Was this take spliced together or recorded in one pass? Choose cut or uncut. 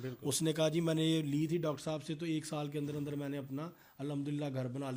uncut